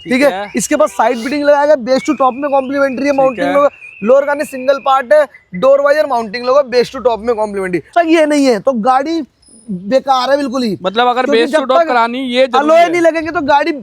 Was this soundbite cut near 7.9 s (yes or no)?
yes